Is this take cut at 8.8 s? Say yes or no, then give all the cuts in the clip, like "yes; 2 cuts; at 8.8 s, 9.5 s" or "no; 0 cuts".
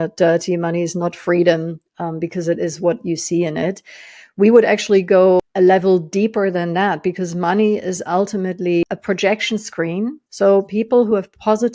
yes; 3 cuts; at 5.5 s, 8.8 s, 10.2 s